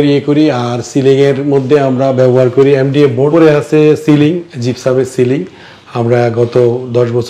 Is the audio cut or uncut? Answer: cut